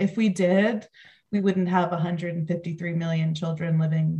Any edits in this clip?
no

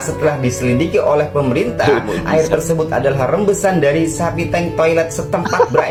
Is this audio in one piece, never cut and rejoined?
yes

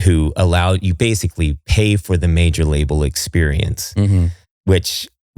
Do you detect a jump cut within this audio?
no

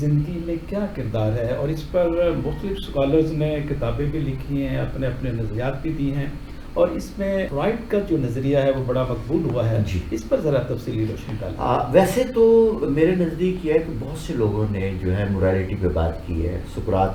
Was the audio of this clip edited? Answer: no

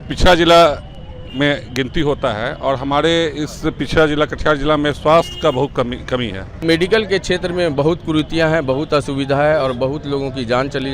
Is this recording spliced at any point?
yes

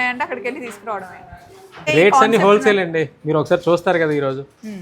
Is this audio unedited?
no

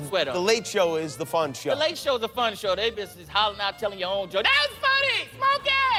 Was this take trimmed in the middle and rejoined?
no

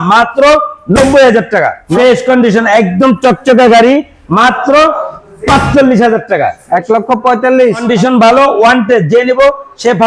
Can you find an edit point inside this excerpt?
yes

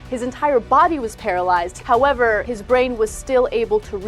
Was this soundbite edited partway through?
yes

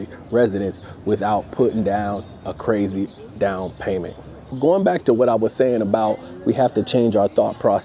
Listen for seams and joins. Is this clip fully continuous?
no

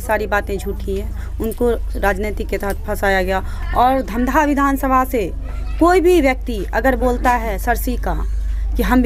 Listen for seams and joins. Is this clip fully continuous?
yes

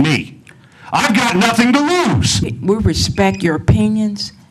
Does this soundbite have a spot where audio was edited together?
yes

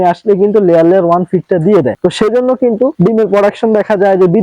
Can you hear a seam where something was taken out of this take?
yes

